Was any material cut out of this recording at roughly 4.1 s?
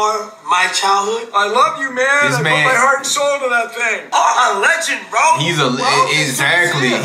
yes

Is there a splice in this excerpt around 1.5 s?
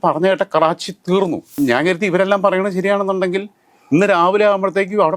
yes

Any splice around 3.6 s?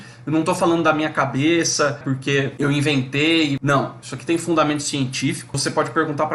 yes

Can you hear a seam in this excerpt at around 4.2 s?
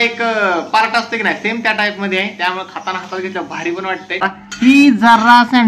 yes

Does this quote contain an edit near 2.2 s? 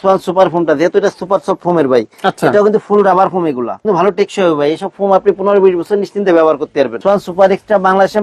no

